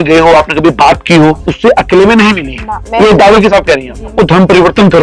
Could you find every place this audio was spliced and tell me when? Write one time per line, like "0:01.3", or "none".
0:01.5
0:04.1